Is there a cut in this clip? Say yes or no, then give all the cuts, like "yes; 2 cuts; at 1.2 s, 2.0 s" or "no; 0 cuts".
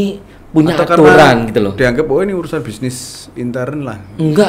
no; 0 cuts